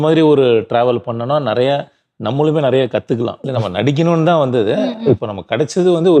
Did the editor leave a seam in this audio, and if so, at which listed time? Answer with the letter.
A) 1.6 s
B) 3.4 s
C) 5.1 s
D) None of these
B